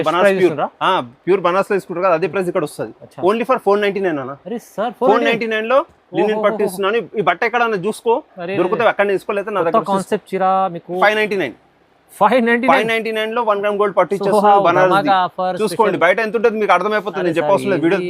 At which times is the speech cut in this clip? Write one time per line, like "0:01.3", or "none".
0:11.0